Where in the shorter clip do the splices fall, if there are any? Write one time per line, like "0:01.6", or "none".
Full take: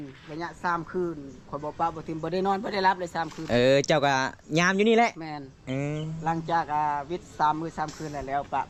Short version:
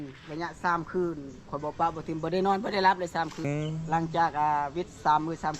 0:03.4